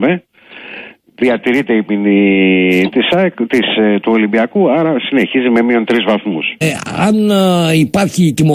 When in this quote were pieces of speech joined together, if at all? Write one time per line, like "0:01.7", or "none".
none